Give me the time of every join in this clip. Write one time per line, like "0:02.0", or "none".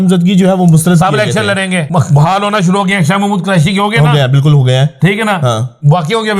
0:01.8